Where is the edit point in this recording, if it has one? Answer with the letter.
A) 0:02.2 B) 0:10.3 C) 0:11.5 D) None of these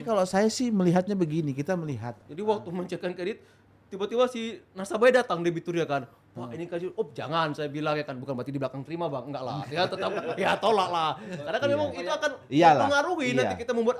A